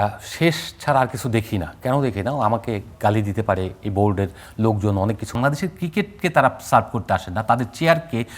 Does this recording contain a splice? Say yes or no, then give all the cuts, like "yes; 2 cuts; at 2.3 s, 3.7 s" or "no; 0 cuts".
yes; 1 cut; at 5.4 s